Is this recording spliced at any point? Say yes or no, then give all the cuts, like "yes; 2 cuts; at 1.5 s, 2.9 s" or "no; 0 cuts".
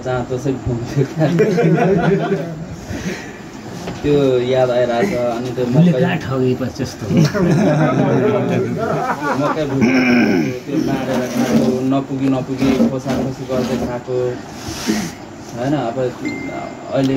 no; 0 cuts